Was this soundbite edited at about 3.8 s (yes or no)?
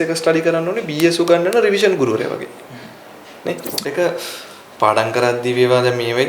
yes